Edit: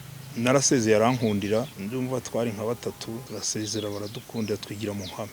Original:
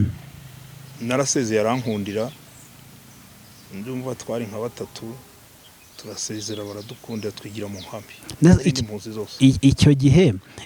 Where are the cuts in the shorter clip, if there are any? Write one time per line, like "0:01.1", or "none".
0:01.7
0:03.3